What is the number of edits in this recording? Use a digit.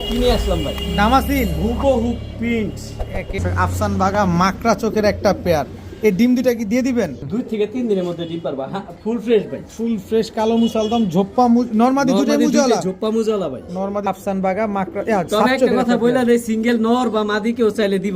3